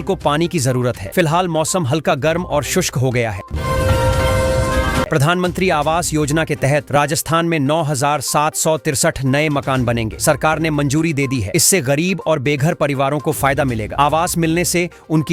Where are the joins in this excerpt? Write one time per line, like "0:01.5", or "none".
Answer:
0:03.5
0:05.1

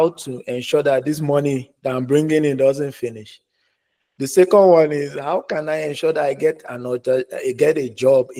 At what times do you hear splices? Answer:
none

